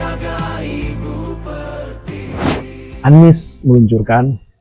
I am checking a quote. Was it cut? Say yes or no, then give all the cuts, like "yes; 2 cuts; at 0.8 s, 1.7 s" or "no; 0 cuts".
yes; 1 cut; at 2.6 s